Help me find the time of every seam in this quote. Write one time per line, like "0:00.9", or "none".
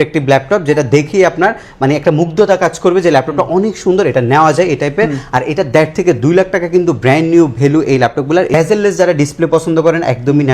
0:08.5